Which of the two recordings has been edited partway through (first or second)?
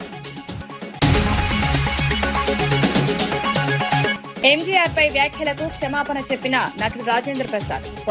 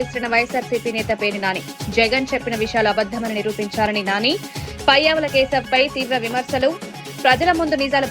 first